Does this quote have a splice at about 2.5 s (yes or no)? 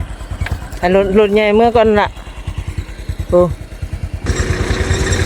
no